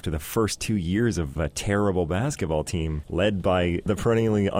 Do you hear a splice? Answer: yes; 3 cuts; at 1.4 s, 3.0 s, 3.8 s

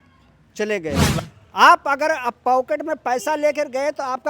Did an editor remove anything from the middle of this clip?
yes; 1 cut; at 1.2 s

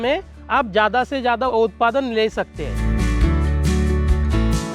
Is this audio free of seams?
no; 2 cuts; at 1.5 s, 2.7 s

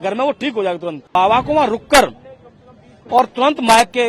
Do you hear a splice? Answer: yes; 1 cut; at 1.2 s

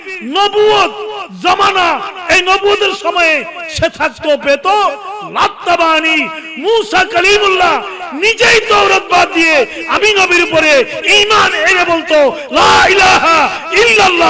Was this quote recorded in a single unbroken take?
yes; 0 cuts

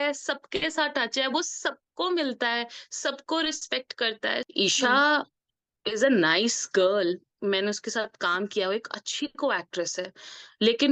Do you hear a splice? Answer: yes; 1 cut; at 4.5 s

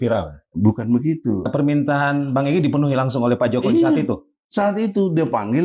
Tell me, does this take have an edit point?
yes; 1 cut; at 1.5 s

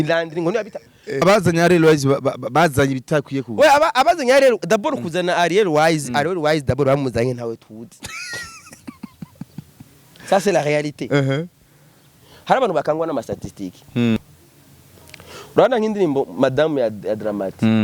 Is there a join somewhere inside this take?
yes; 2 cuts; at 1.2 s, 14.2 s

